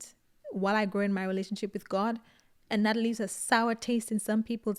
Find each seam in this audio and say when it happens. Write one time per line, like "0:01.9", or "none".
none